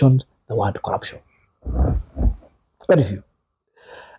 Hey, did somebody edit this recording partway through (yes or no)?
no